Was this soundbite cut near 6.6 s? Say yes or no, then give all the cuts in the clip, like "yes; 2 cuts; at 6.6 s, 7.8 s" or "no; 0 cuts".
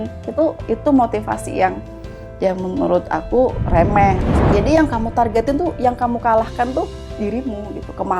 no; 1 cut; at 4.3 s